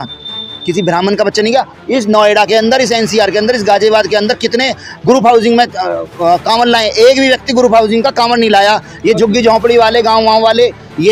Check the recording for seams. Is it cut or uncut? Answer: uncut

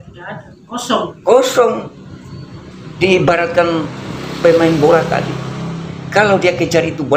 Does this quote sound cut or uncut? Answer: uncut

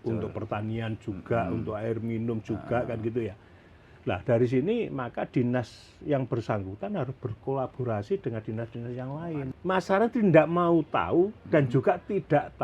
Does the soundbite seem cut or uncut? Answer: cut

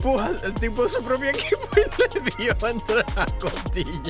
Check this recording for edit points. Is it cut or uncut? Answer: uncut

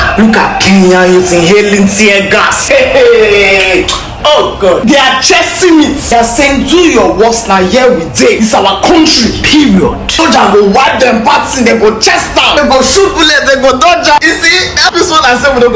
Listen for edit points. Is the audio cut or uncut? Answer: uncut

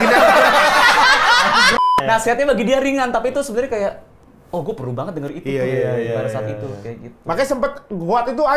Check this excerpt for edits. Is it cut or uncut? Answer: cut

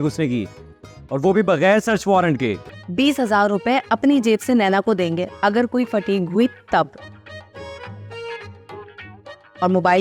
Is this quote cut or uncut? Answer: cut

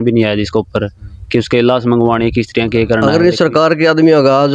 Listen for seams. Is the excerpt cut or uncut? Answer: cut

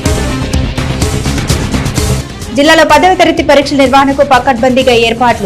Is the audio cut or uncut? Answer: uncut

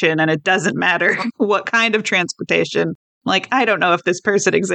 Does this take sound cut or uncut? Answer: cut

